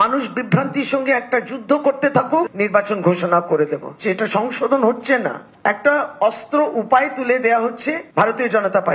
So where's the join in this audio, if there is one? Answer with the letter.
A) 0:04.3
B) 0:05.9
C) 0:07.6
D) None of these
D